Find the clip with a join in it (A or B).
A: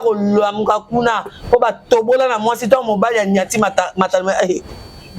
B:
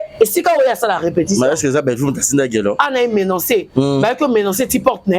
B